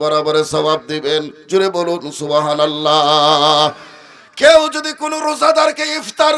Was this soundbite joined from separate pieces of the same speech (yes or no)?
no